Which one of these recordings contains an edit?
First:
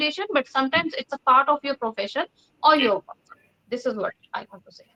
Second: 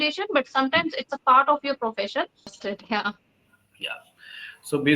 second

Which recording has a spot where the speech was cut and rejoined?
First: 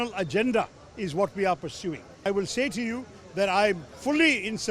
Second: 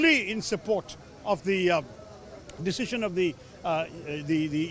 first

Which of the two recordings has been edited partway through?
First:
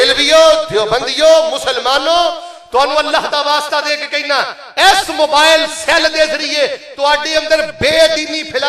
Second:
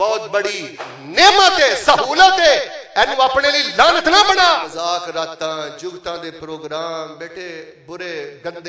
second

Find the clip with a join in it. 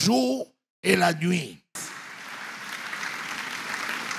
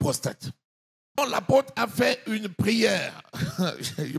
second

